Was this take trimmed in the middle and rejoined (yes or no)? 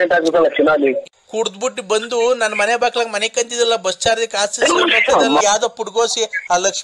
yes